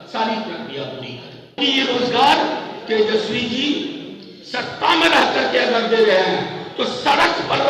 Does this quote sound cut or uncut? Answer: cut